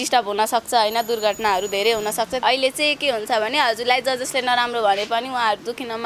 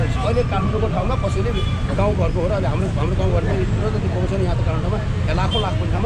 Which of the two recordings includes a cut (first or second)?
first